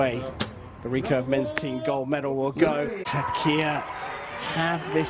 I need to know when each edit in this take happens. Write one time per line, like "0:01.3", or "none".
0:03.0